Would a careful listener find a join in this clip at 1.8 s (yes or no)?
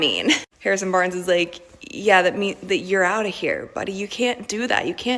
no